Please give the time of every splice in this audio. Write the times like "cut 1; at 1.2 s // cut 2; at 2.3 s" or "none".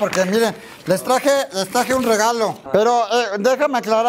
cut 1; at 2.7 s